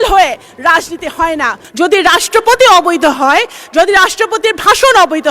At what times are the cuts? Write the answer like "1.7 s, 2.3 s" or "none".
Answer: 1.6 s

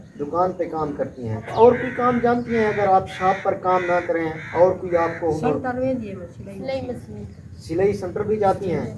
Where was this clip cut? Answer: 1.5 s

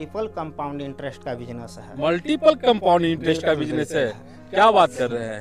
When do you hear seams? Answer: none

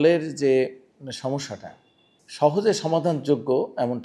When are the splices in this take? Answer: none

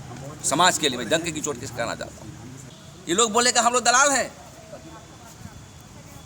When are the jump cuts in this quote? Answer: 3.2 s

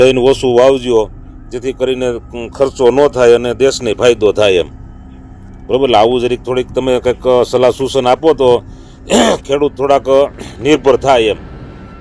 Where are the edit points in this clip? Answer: none

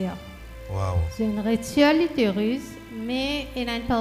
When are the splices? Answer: none

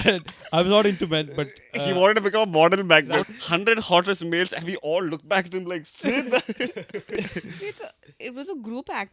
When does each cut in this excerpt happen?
3.2 s, 7.1 s

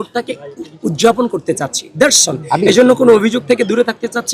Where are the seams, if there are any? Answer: none

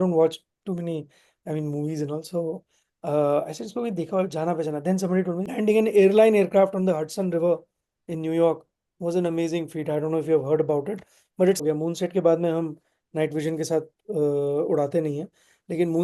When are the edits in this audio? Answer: 5.5 s, 11.6 s

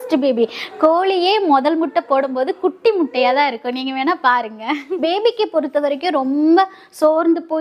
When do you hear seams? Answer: 4.8 s

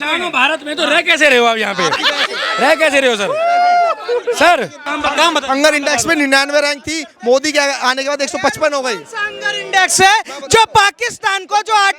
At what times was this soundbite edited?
4.8 s

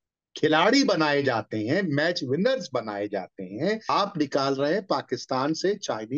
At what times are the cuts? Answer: 3.9 s

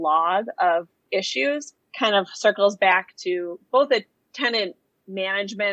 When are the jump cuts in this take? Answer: 1.8 s, 4.2 s

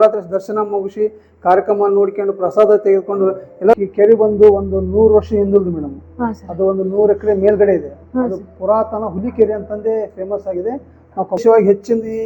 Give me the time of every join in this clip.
3.7 s, 11.4 s

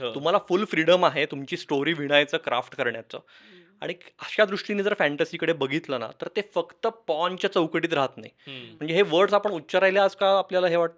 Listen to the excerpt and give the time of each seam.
none

